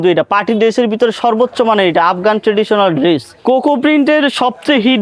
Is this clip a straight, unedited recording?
no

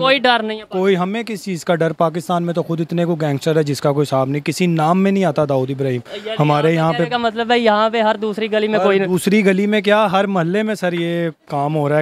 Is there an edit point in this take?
no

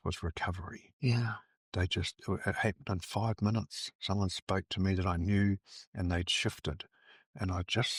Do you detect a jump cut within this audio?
no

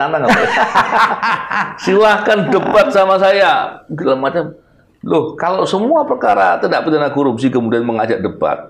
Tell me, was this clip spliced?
no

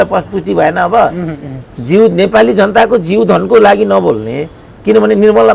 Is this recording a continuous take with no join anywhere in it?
yes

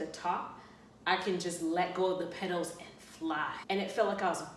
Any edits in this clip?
yes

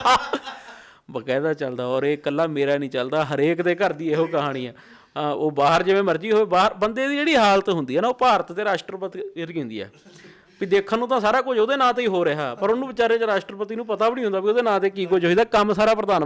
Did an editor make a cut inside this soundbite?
no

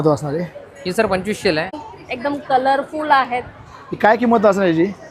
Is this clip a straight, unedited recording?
no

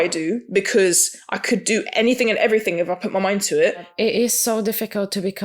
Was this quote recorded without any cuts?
no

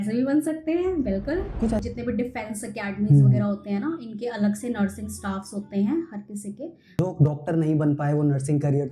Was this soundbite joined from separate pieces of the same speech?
yes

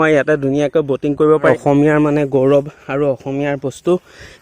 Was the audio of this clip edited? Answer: yes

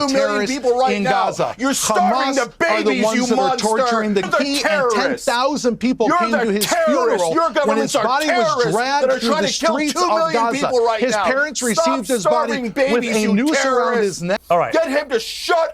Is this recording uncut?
no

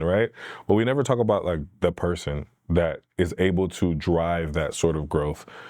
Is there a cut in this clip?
no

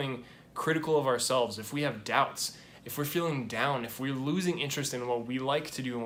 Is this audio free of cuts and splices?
yes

